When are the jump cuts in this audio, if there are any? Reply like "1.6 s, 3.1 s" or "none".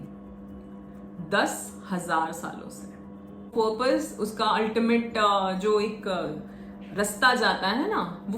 3.5 s